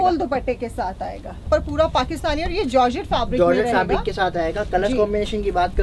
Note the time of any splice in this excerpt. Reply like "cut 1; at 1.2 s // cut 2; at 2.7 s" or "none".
cut 1; at 1.4 s